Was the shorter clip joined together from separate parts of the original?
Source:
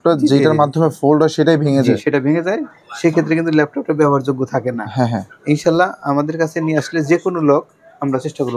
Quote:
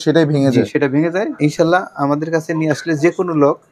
yes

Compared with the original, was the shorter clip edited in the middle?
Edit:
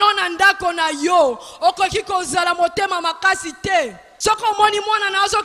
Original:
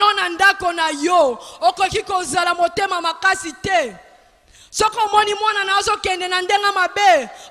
yes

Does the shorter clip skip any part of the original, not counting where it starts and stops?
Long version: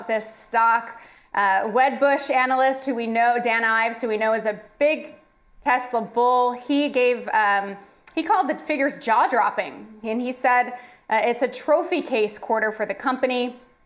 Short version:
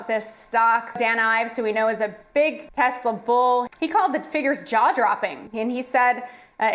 yes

